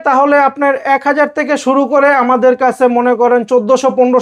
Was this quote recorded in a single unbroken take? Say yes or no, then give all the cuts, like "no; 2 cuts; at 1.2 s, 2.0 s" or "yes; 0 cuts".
yes; 0 cuts